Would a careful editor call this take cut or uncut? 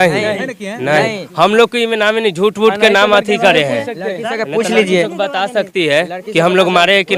uncut